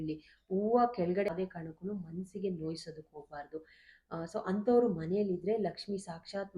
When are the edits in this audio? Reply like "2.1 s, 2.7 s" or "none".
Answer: 1.3 s